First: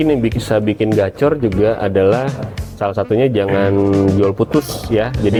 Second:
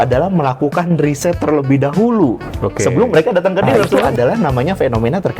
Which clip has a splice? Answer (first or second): second